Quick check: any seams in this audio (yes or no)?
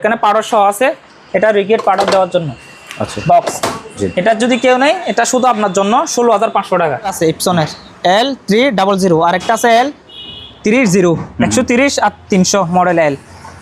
yes